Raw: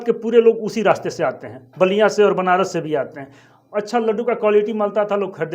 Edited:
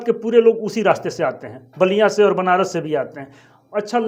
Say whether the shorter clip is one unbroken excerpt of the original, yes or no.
yes